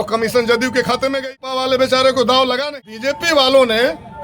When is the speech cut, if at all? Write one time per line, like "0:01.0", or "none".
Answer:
0:01.4
0:02.7